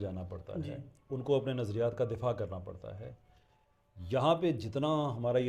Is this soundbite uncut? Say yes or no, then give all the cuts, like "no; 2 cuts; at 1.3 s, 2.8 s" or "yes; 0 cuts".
yes; 0 cuts